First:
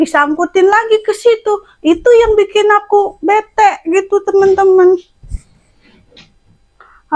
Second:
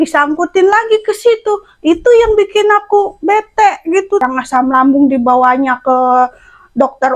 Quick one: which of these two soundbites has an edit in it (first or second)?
second